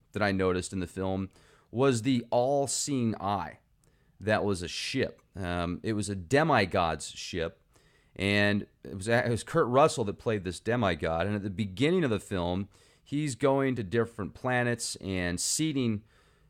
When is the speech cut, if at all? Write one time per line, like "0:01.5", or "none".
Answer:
none

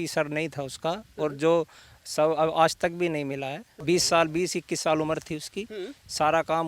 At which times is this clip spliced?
0:03.7

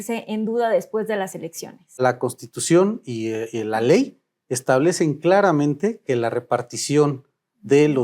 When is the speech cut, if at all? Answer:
0:02.0

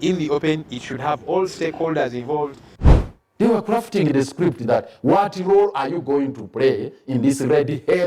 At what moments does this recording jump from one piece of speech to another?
0:02.7

